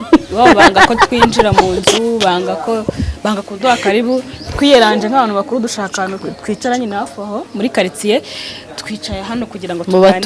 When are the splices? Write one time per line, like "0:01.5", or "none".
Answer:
none